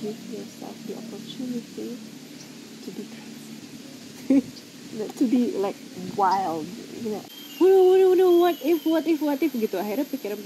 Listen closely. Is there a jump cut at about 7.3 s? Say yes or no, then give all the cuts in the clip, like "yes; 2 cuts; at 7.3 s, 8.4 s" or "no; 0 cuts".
yes; 1 cut; at 7.3 s